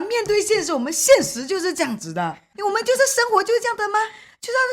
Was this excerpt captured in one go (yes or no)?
no